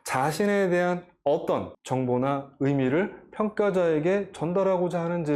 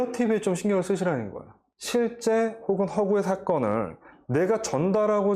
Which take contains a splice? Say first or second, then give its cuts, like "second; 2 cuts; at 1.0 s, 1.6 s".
second; 1 cut; at 1.7 s